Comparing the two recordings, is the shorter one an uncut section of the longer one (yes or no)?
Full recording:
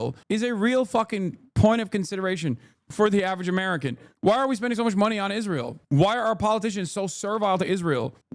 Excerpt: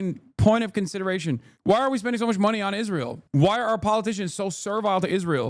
no